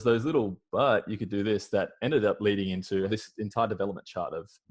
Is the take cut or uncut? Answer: cut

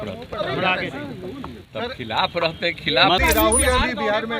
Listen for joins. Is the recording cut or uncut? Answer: cut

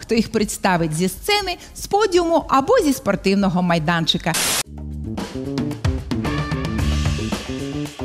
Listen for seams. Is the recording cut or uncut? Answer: cut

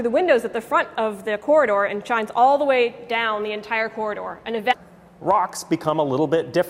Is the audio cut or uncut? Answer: uncut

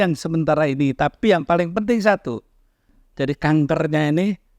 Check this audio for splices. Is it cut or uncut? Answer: cut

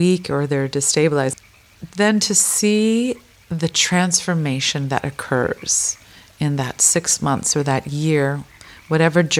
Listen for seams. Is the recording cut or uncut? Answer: cut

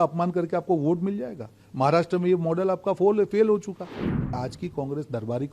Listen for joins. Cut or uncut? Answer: cut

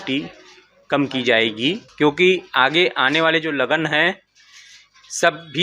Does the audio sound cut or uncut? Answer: cut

